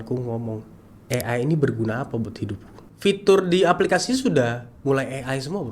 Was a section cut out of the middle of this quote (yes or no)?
yes